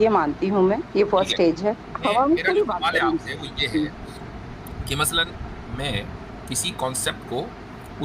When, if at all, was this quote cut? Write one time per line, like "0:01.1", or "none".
0:01.9